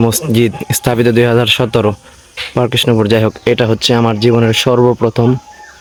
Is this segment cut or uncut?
uncut